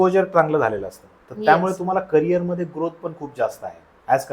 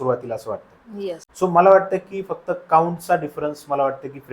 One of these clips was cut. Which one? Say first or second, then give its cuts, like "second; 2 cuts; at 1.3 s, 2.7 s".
second; 1 cut; at 1.3 s